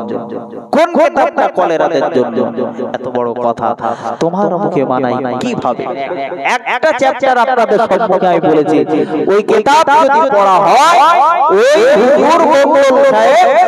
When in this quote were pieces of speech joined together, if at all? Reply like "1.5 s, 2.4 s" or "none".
5.9 s